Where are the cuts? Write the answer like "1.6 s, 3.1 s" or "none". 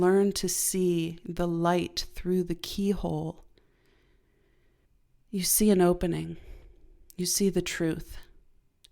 4.8 s